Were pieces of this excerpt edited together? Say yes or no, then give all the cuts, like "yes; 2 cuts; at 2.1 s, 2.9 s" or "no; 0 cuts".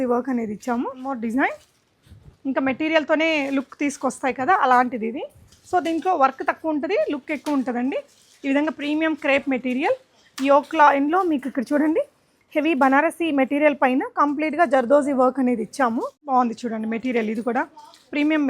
yes; 2 cuts; at 1.2 s, 16.2 s